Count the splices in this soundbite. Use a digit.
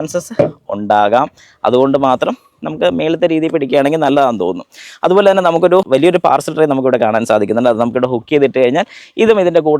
0